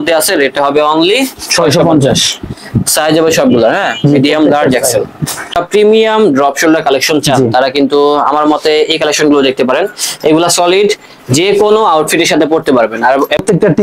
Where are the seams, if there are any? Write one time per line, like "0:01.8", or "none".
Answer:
0:05.5
0:13.0